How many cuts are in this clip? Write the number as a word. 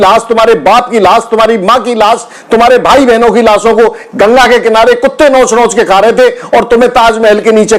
zero